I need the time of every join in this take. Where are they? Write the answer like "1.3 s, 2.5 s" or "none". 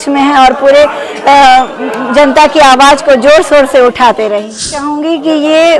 4.9 s